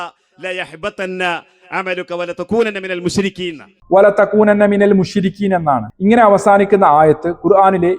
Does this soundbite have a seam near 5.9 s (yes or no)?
no